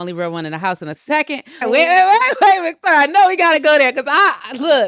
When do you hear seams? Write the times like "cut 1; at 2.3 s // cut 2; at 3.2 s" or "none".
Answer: cut 1; at 1.6 s